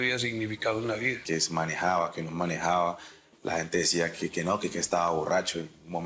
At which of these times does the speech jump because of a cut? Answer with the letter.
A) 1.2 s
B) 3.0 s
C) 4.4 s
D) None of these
A